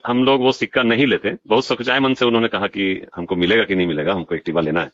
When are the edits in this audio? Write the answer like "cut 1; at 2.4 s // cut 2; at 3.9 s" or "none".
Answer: none